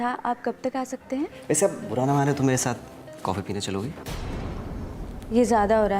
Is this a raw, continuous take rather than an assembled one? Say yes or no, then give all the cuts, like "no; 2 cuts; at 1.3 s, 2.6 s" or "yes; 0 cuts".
no; 1 cut; at 1.4 s